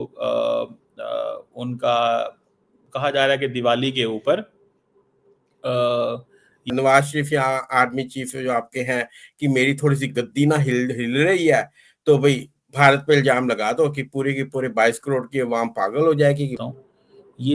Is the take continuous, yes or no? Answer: no